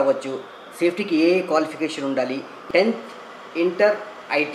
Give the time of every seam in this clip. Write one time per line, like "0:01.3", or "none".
0:02.5